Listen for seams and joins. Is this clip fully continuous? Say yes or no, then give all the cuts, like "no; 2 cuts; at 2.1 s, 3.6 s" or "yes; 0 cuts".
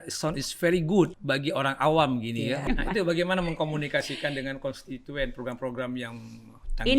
no; 2 cuts; at 1.2 s, 2.6 s